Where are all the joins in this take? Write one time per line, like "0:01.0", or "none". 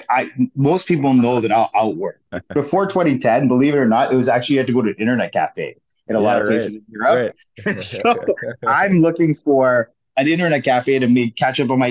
0:02.2